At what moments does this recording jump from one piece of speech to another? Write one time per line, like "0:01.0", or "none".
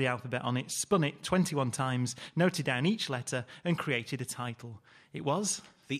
0:01.2